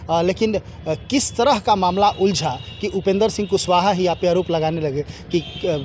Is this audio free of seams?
yes; 0 cuts

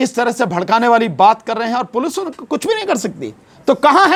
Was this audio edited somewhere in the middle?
no; 0 cuts

